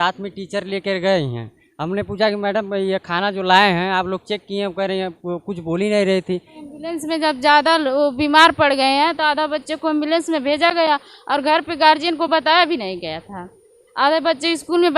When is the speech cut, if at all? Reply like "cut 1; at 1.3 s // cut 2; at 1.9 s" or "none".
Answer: cut 1; at 6.5 s